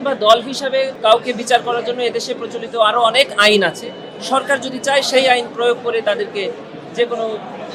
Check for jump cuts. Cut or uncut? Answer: cut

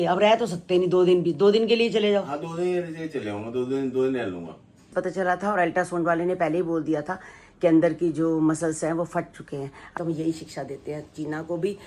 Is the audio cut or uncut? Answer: cut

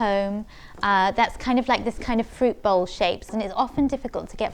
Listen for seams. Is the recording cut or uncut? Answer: cut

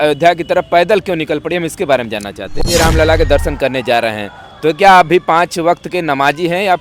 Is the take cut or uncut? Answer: cut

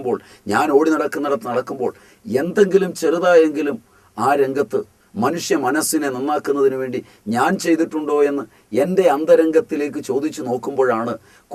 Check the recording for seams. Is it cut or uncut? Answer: uncut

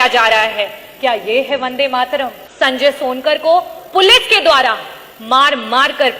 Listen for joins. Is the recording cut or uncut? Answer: cut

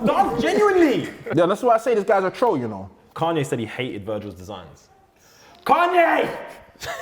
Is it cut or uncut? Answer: cut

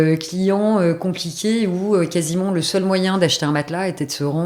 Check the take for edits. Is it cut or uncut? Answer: uncut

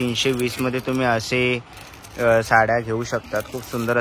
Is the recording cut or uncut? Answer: uncut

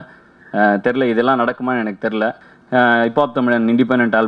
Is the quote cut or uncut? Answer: cut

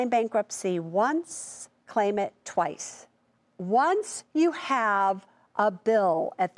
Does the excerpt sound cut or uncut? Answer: cut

